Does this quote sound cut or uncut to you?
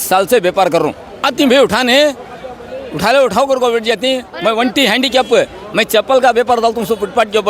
cut